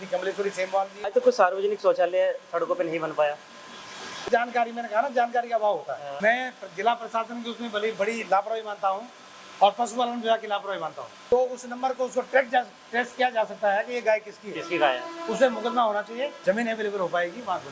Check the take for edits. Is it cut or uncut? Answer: cut